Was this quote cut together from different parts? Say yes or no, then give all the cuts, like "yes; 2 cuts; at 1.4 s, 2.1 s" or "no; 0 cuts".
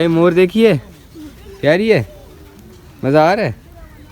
no; 0 cuts